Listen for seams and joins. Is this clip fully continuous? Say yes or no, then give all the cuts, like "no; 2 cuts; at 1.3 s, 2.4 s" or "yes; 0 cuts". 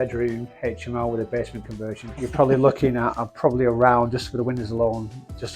no; 1 cut; at 2.1 s